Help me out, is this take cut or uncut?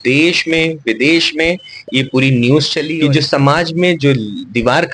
cut